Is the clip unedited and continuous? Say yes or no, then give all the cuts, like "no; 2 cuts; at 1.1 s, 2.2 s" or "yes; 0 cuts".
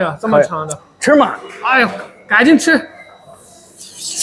yes; 0 cuts